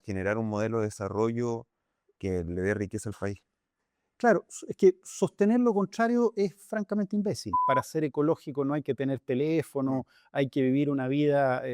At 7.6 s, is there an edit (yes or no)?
yes